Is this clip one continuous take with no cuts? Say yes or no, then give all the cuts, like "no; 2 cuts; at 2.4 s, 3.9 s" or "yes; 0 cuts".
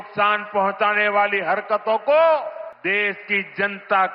no; 1 cut; at 2.7 s